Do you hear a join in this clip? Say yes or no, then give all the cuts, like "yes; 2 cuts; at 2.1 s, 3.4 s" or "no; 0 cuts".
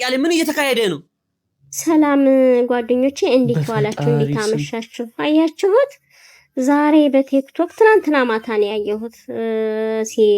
yes; 1 cut; at 1.1 s